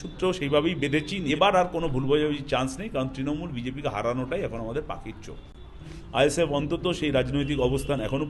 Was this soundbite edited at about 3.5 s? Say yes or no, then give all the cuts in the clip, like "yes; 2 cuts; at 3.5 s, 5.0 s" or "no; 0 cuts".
no; 2 cuts; at 1.3 s, 5.9 s